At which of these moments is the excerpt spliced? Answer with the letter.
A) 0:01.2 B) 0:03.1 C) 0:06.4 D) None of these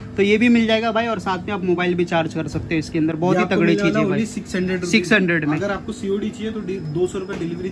D